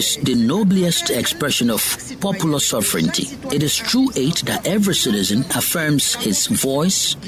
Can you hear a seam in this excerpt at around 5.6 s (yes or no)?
yes